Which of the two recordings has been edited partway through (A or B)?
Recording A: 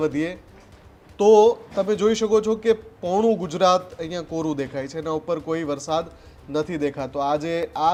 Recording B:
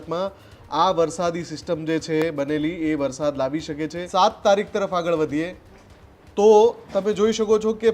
B